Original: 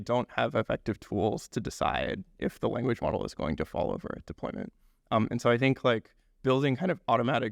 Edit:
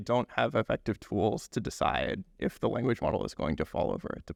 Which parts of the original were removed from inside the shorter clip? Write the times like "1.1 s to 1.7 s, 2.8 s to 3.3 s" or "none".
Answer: none